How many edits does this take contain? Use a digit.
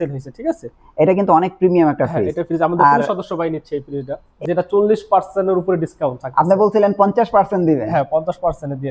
1